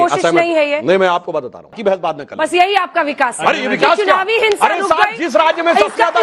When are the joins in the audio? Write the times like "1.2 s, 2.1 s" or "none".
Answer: 1.8 s

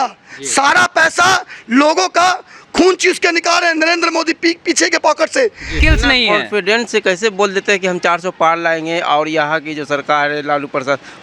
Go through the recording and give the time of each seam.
5.7 s

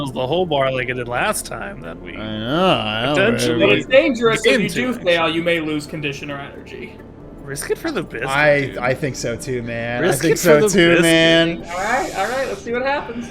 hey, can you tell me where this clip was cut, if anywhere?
7.2 s

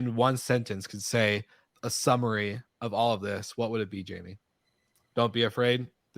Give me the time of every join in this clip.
none

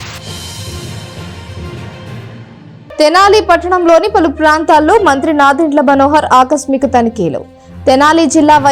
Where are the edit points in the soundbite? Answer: 2.8 s

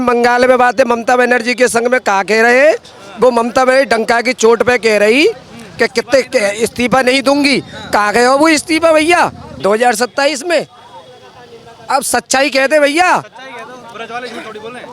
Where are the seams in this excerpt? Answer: 9.5 s

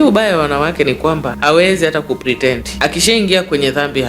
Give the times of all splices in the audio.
1.3 s, 2.7 s

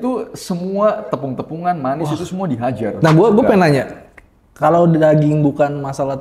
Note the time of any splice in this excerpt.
2.9 s

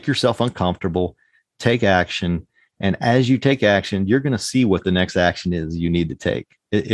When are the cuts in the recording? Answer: none

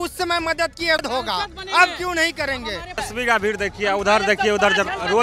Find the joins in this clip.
3.0 s

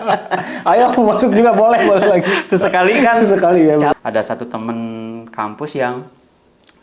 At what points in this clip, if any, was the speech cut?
3.9 s

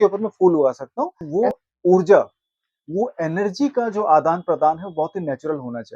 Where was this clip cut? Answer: 1.2 s

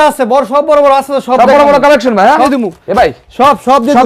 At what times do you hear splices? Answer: 2.5 s

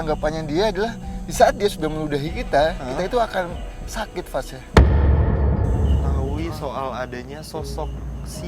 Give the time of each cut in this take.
6.2 s

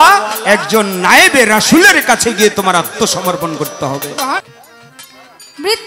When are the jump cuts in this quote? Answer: 4.4 s

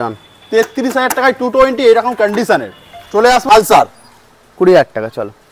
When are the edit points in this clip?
3.4 s

